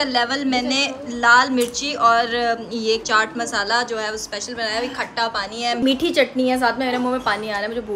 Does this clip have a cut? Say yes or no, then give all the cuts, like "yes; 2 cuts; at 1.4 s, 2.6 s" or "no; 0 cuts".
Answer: no; 0 cuts